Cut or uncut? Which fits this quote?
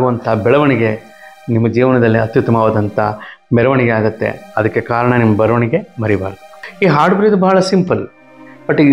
cut